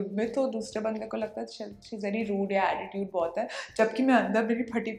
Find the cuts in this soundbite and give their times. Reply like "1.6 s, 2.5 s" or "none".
none